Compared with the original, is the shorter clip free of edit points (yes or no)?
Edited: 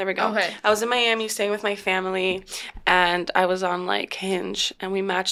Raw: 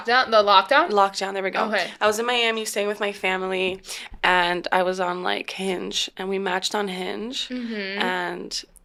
yes